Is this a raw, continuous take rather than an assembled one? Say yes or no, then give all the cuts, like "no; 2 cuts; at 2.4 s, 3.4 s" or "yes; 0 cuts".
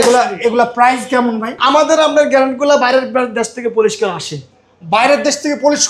no; 1 cut; at 1.5 s